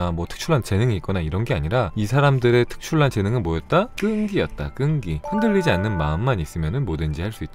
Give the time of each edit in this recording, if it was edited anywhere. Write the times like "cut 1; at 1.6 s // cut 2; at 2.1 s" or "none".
cut 1; at 1.9 s // cut 2; at 3.9 s // cut 3; at 5.2 s